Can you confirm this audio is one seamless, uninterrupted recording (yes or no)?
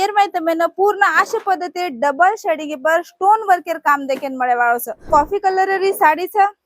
no